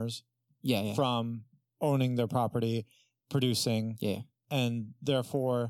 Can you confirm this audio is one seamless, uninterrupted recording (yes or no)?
yes